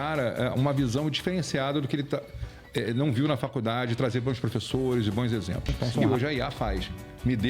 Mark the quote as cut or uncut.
cut